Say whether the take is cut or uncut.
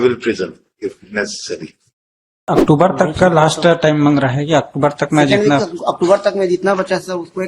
cut